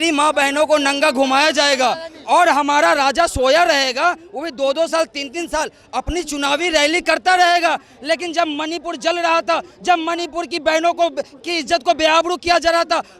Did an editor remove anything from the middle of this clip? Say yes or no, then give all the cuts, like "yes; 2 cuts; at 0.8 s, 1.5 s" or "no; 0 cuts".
no; 0 cuts